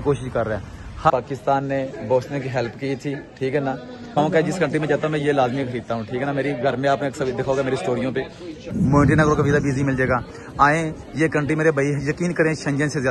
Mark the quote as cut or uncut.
cut